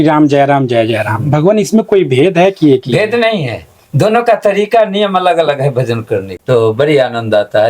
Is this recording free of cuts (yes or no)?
no